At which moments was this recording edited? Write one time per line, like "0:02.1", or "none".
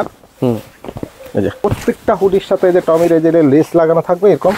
0:01.6